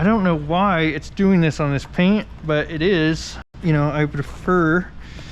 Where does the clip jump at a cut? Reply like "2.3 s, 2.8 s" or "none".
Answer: 3.5 s